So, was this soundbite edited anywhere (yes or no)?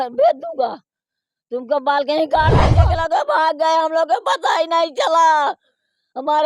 yes